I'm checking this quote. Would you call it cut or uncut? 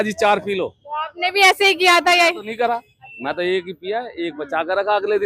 uncut